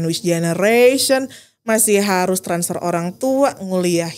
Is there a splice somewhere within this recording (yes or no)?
no